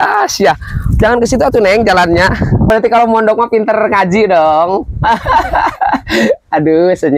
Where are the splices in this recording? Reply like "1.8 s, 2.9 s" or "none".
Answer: 2.7 s